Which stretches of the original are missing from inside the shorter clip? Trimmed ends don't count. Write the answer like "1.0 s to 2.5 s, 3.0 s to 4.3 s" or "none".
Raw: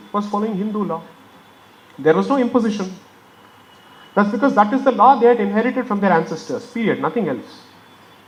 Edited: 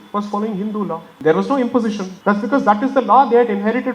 1.1 s to 1.9 s, 2.9 s to 4.0 s

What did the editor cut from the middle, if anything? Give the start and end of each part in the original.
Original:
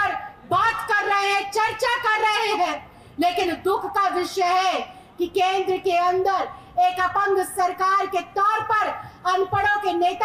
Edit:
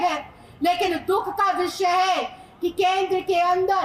none

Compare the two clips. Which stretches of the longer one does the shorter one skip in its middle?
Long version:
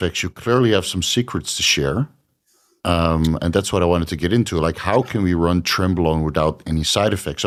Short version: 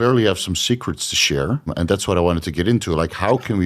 2.2 s to 3.4 s

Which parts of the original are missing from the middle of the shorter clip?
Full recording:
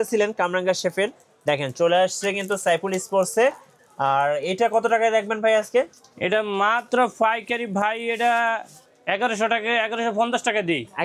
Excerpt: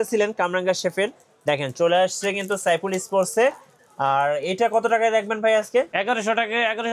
5.9 s to 9.0 s

